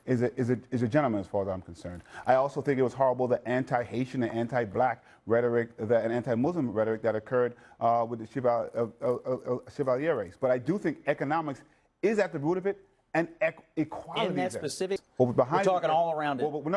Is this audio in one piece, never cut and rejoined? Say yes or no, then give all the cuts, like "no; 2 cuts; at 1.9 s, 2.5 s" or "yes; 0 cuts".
no; 1 cut; at 15.1 s